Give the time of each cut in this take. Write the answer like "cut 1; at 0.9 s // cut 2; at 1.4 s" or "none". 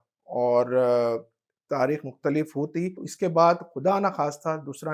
none